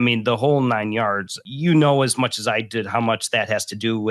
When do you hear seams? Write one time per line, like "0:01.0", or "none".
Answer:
0:01.4